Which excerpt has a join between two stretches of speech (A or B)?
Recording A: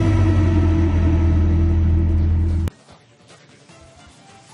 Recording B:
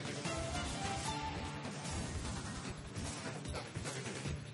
B